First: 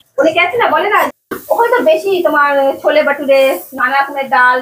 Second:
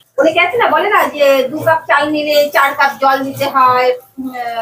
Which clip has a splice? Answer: first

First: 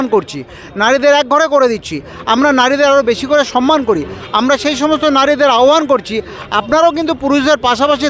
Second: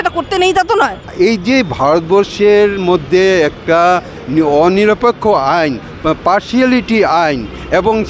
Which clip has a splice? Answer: second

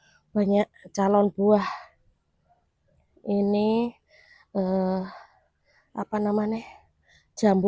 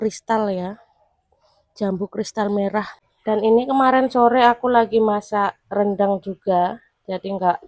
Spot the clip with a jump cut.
second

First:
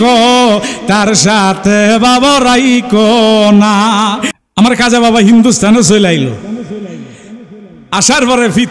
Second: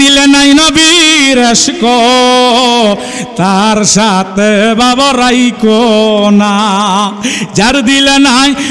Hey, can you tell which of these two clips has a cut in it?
first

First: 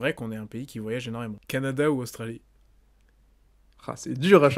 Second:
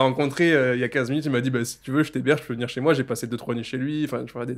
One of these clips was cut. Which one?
first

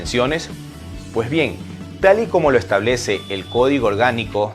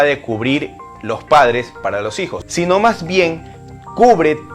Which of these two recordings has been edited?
second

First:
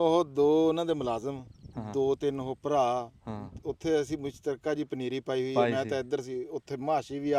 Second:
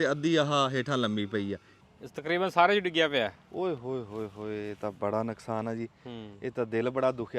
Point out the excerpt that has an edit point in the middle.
second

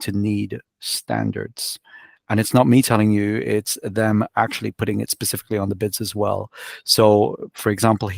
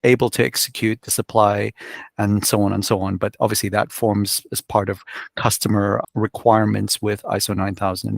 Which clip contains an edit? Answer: second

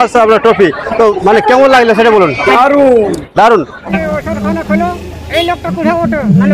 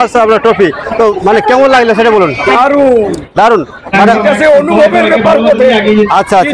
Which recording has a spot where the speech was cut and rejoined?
first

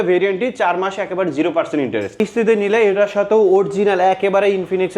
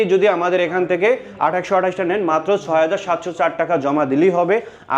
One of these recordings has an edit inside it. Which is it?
first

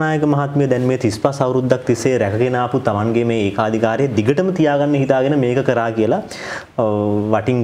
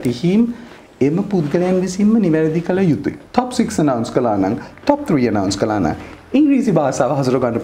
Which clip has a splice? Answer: second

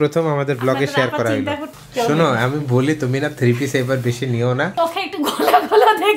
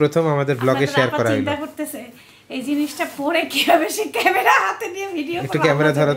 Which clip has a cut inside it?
first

